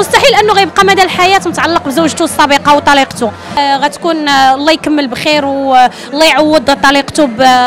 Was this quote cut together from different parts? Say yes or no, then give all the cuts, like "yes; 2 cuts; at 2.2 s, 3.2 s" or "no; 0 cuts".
yes; 1 cut; at 3.6 s